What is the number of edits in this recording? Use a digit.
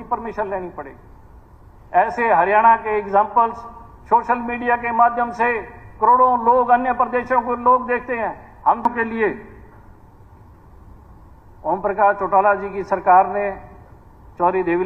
1